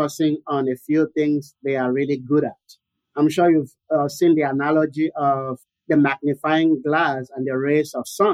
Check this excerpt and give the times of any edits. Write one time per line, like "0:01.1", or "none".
0:05.7